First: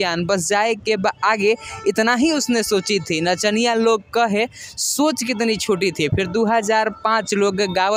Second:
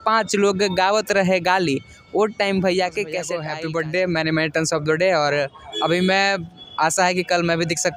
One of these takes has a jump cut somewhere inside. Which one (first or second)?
second